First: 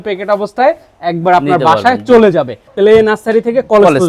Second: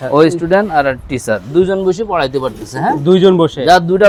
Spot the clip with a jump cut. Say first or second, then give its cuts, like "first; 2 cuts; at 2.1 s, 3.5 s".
first; 1 cut; at 2.7 s